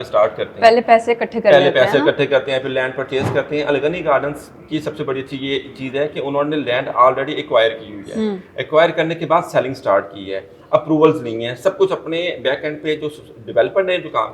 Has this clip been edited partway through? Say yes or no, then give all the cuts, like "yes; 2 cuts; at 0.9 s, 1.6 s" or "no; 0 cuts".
no; 0 cuts